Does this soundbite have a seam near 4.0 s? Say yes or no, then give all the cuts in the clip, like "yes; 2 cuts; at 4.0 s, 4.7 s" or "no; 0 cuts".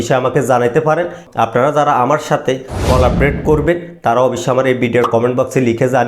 no; 1 cut; at 1.2 s